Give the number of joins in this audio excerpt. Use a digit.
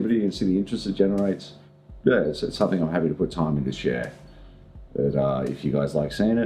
1